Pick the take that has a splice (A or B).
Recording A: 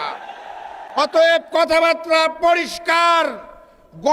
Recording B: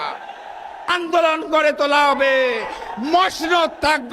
B